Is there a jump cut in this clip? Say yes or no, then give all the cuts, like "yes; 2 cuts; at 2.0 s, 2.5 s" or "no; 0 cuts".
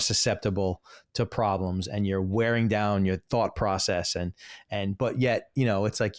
no; 0 cuts